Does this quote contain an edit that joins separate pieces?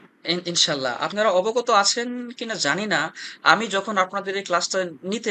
no; 0 cuts

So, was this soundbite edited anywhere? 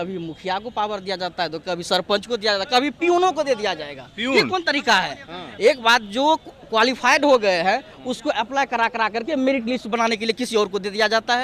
no; 0 cuts

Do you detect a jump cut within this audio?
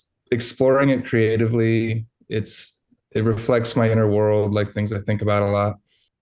no; 0 cuts

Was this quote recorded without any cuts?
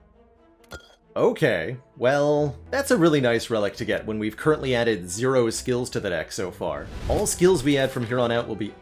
no; 1 cut; at 2.6 s

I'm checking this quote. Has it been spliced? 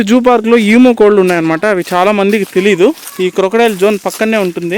no; 0 cuts

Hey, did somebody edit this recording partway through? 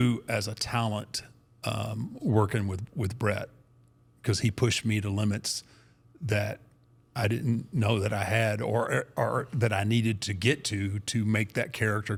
no; 0 cuts

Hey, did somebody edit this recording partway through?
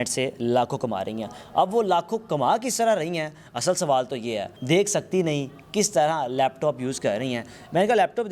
no; 0 cuts

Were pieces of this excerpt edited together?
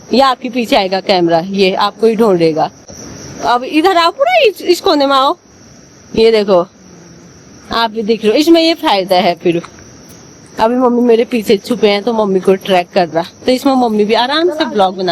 no; 0 cuts

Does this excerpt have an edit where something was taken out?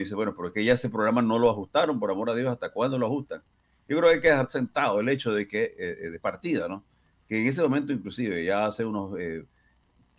no; 0 cuts

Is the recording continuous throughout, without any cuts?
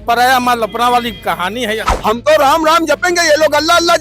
no; 1 cut; at 1.9 s

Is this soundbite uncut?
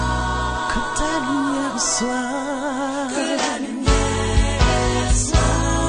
yes; 0 cuts

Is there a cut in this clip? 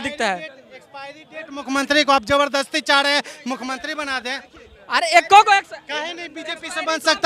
no; 0 cuts

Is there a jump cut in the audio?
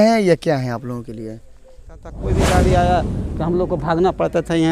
yes; 1 cut; at 2.2 s

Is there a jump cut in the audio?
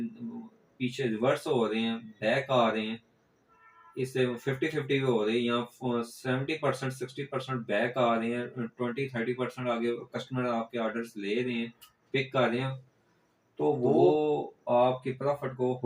yes; 1 cut; at 14.1 s

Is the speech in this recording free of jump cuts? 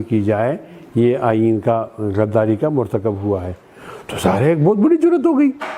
yes; 0 cuts

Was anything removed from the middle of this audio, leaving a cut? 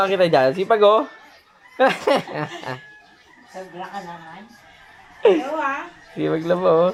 no; 0 cuts

